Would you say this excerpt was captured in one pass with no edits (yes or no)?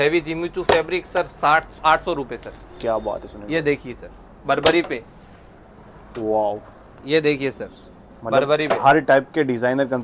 yes